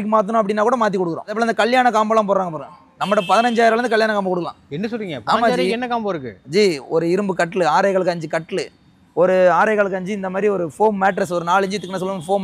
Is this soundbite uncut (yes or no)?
no